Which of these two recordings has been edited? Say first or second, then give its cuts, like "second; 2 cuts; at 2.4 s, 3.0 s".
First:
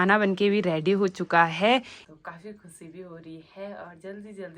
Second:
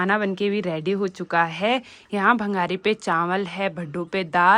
first; 1 cut; at 2.0 s